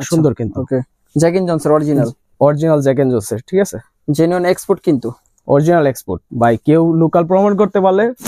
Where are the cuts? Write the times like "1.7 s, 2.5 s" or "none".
none